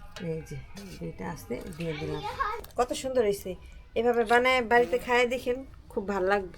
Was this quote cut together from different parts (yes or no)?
yes